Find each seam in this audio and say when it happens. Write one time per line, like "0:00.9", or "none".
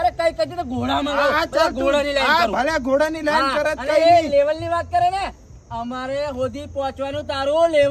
none